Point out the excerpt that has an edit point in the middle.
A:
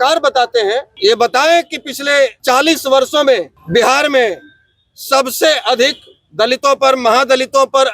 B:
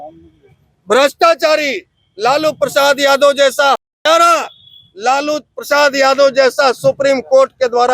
A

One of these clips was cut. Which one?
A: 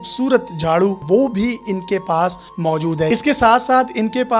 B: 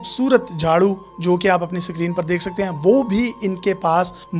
A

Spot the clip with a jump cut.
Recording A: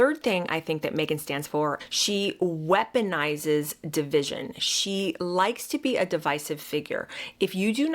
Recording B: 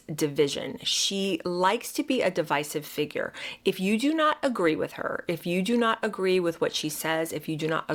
A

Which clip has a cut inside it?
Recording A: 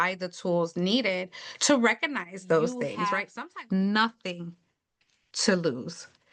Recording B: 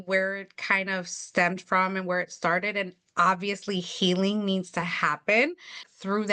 A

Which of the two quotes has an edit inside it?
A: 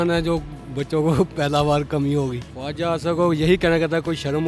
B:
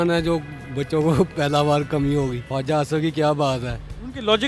A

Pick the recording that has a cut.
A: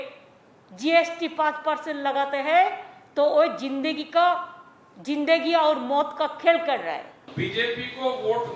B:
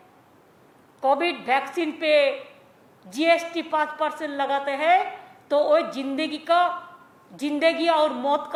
A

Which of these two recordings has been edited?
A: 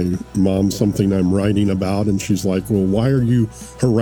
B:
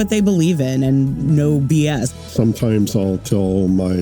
B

